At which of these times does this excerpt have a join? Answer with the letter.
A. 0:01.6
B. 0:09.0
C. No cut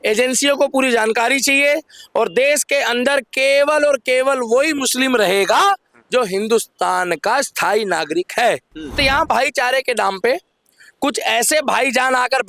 B